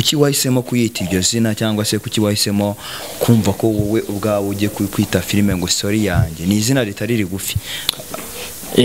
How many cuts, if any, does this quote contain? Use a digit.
0